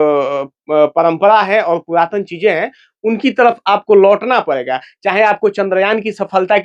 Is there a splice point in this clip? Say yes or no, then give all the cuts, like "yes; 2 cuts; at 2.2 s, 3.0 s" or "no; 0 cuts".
no; 0 cuts